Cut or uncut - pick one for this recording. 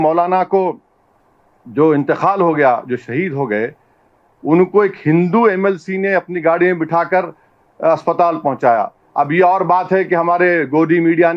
uncut